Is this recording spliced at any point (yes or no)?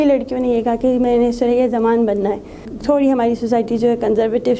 yes